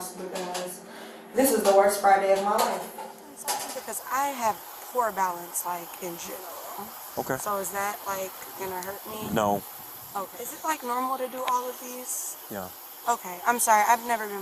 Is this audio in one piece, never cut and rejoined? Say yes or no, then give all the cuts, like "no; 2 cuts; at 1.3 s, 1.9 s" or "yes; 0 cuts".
no; 2 cuts; at 3.7 s, 10.4 s